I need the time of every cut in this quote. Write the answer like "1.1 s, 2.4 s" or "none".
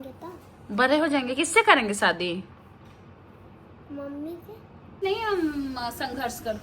5.0 s